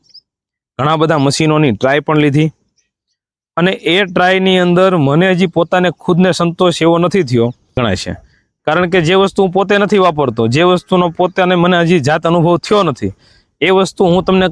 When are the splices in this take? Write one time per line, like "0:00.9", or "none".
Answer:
0:07.6